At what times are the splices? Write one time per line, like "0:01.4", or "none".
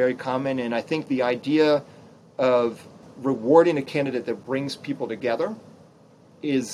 0:03.1